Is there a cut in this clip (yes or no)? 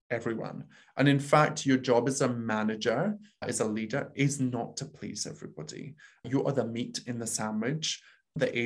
yes